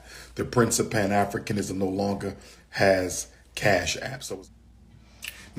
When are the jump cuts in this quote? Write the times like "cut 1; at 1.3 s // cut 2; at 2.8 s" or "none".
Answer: cut 1; at 4.1 s